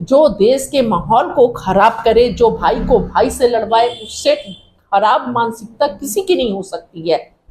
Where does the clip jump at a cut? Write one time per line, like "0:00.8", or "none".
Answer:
none